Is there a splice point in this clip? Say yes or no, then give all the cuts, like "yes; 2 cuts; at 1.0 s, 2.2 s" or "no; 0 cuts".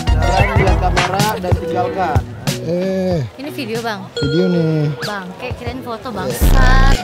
no; 0 cuts